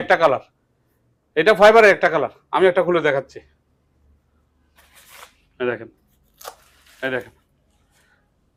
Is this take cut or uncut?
uncut